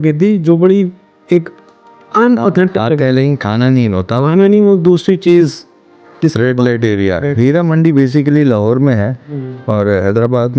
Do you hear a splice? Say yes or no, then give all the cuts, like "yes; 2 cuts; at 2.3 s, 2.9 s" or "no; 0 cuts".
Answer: no; 0 cuts